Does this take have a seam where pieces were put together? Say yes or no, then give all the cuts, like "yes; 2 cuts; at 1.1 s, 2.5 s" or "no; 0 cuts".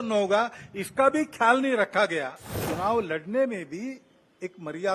yes; 1 cut; at 2.6 s